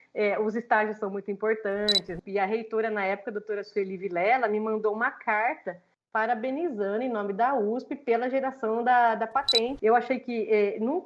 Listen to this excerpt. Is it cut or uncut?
cut